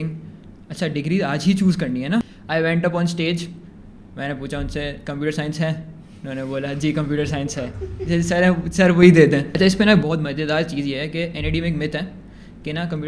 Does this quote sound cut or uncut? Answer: cut